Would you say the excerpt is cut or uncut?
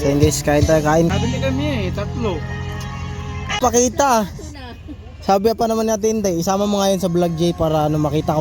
cut